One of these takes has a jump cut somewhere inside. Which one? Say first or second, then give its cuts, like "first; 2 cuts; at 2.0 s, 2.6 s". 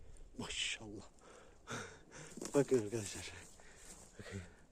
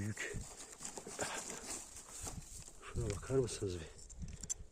first; 1 cut; at 1.1 s